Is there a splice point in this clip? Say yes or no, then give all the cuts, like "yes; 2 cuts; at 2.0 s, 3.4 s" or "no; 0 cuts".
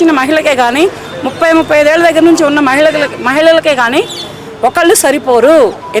no; 0 cuts